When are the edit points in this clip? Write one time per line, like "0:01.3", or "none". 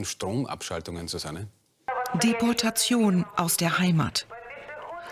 0:01.9